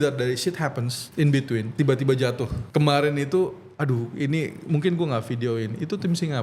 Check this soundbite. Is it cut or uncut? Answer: cut